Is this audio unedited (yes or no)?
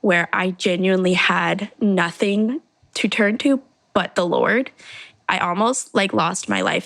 no